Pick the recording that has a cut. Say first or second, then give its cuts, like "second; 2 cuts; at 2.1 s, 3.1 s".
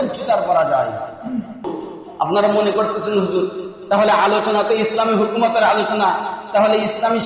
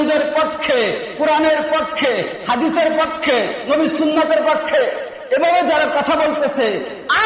first; 1 cut; at 1.8 s